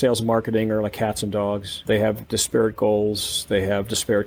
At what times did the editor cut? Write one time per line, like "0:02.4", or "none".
none